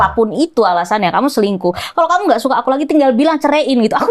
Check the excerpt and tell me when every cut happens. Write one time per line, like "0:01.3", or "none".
none